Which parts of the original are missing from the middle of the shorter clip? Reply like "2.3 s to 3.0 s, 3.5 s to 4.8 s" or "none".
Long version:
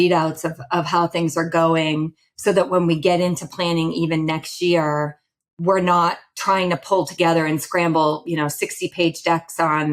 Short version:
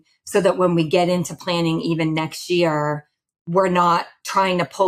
none